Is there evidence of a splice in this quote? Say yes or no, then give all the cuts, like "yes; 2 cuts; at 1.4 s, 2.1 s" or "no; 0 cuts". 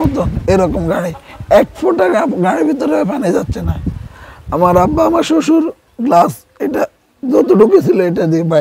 no; 0 cuts